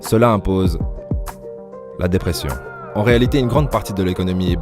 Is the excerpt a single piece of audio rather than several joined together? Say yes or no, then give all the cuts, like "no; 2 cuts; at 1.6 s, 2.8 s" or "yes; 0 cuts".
no; 1 cut; at 2.8 s